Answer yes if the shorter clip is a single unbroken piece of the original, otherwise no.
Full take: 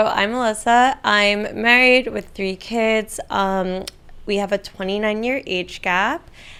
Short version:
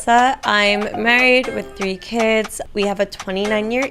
no